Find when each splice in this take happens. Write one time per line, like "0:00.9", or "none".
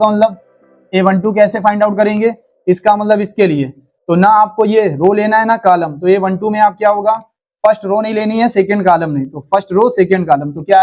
none